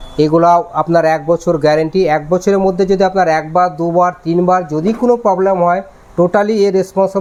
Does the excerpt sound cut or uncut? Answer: uncut